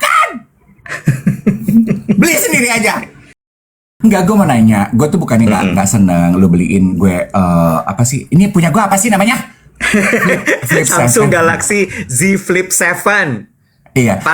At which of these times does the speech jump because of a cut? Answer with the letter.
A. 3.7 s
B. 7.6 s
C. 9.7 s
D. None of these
A